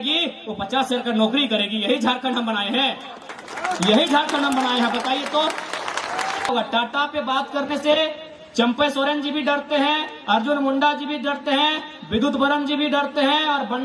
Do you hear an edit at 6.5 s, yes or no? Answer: yes